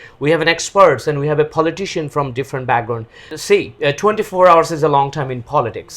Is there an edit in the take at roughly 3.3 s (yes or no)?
yes